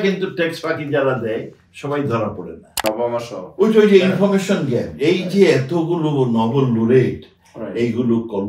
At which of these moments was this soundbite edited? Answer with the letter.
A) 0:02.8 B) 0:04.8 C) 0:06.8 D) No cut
A